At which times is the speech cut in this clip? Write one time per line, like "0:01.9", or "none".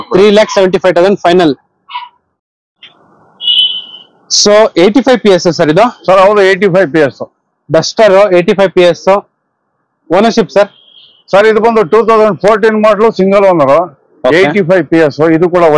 none